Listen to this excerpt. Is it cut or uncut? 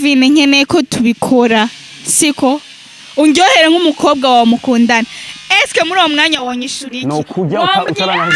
uncut